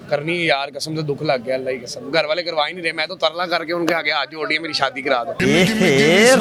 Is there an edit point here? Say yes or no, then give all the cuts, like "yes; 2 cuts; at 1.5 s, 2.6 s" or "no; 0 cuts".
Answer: no; 0 cuts